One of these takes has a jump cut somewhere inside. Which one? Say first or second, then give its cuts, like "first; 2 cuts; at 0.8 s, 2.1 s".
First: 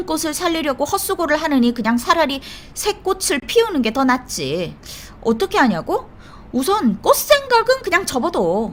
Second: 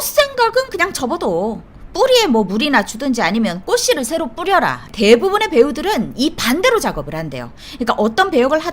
second; 1 cut; at 4.9 s